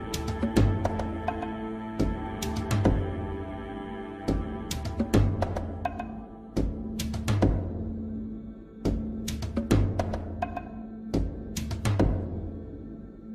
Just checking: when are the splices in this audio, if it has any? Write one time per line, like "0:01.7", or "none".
0:12.3